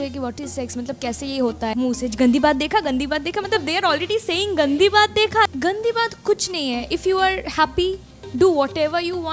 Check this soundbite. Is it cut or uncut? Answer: cut